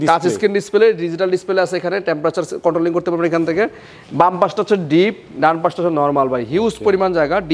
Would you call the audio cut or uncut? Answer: uncut